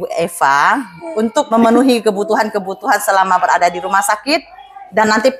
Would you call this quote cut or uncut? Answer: cut